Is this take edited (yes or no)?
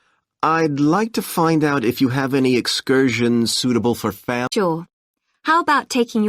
yes